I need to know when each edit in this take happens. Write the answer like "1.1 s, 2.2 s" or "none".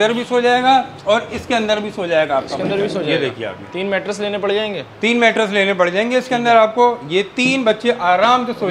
none